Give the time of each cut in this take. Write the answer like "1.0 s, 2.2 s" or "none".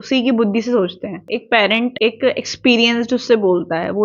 1.2 s, 1.9 s